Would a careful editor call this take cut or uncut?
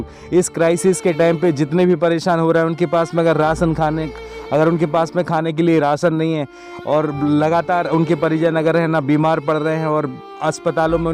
uncut